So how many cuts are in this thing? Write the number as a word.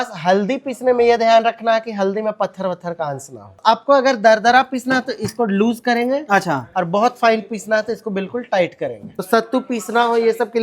two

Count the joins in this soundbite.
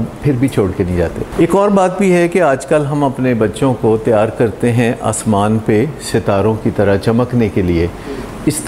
one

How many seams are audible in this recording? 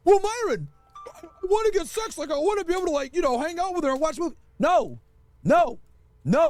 zero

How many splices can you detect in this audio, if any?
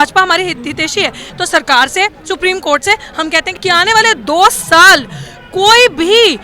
two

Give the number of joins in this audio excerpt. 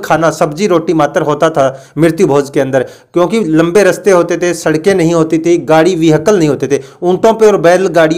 zero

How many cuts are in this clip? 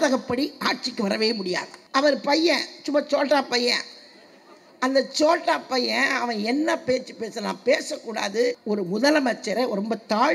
two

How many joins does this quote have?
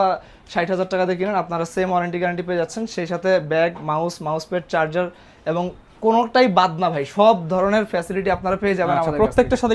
zero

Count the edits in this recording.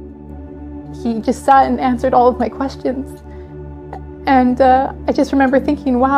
zero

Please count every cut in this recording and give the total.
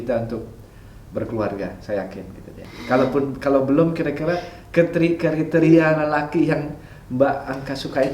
one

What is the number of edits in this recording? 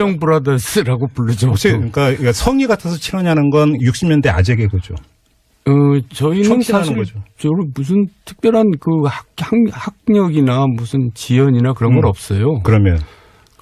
zero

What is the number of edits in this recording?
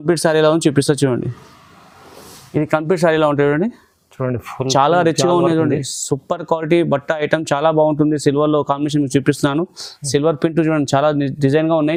zero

